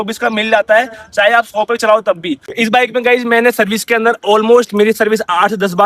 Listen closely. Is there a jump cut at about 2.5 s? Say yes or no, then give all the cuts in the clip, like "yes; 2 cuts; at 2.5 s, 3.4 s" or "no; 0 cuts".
yes; 1 cut; at 2.5 s